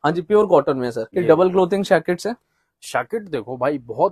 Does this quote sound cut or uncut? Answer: cut